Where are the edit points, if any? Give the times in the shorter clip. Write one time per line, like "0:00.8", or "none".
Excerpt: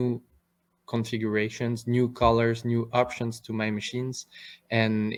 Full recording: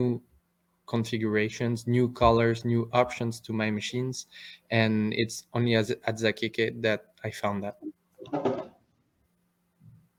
none